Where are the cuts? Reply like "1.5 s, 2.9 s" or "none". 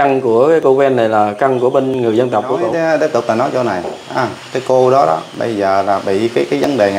2.7 s